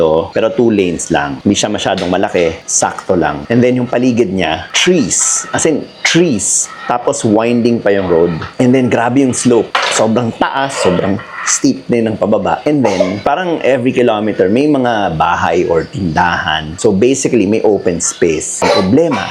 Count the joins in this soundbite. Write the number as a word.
zero